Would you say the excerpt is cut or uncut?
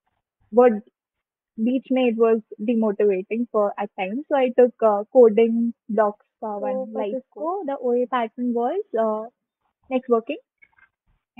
cut